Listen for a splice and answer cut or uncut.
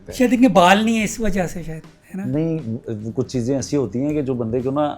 uncut